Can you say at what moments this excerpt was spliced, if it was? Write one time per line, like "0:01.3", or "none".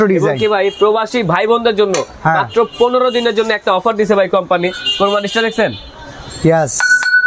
none